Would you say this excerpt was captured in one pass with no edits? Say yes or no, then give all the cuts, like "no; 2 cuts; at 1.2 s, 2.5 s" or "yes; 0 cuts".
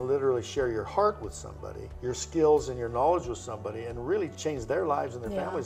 yes; 0 cuts